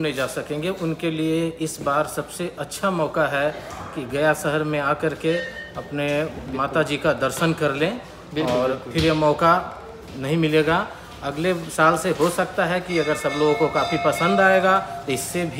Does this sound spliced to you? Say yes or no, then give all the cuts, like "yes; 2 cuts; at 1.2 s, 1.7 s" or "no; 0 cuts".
no; 0 cuts